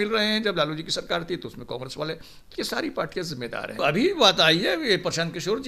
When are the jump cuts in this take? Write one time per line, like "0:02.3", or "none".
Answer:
0:03.8

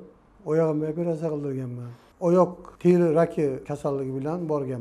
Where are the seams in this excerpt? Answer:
0:03.7

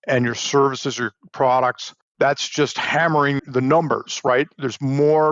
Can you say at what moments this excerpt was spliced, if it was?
0:02.1
0:03.4

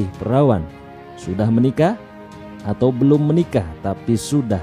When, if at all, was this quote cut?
0:02.0

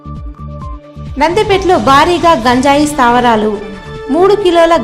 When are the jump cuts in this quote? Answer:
0:01.1

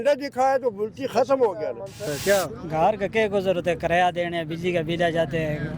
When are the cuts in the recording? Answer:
0:02.0

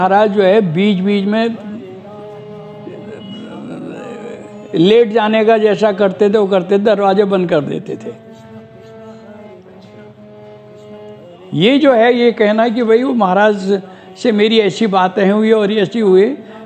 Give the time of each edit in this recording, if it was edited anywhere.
0:08.5
0:11.0

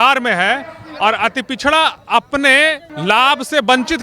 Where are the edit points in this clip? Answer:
0:02.9

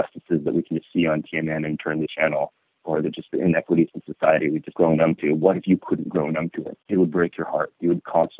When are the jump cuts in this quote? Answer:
0:04.7
0:06.7

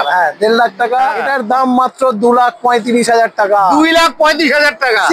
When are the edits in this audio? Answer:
0:01.2

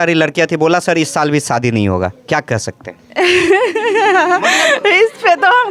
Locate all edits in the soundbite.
none

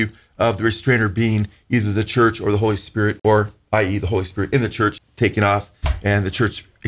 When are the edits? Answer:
0:03.2
0:05.0

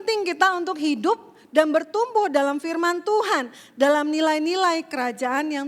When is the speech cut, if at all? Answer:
none

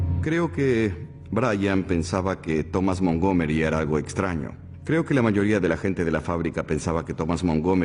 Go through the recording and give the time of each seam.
none

